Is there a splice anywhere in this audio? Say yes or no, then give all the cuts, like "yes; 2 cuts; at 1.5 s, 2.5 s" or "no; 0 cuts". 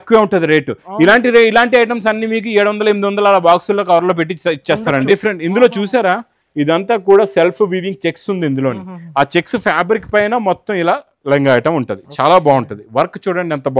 yes; 1 cut; at 5.1 s